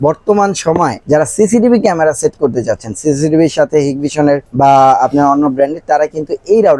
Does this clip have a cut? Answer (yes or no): yes